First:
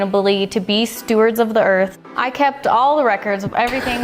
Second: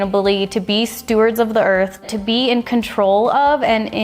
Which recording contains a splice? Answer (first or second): first